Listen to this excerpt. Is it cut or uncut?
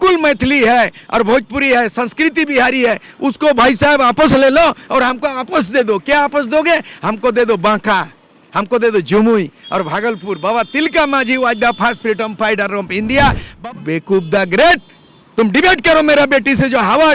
cut